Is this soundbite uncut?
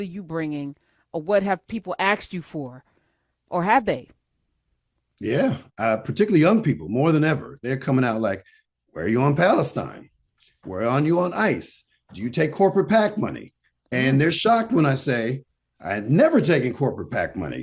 yes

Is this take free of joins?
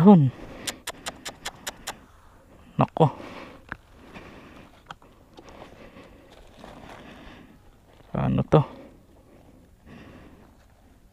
yes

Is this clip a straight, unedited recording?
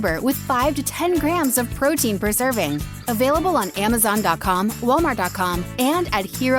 yes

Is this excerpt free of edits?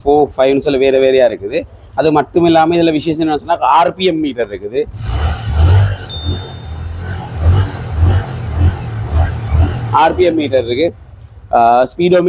yes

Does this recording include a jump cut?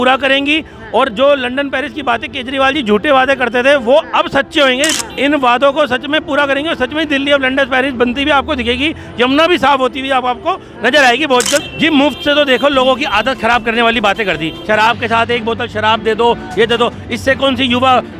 yes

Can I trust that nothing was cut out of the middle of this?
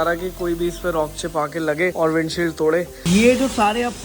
no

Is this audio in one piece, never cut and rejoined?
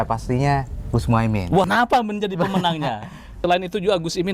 no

